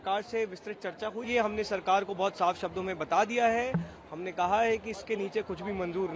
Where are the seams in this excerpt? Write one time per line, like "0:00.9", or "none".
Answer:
0:01.2